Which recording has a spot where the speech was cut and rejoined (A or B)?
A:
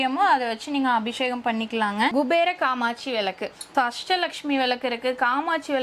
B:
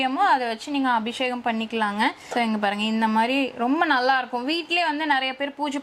A